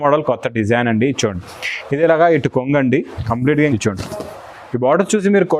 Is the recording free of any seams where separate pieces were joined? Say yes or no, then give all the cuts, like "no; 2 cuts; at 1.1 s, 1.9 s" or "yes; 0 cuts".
no; 1 cut; at 3.7 s